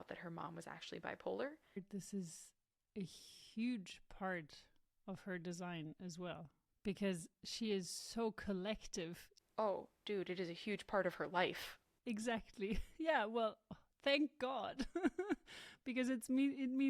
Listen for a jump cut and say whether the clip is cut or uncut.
cut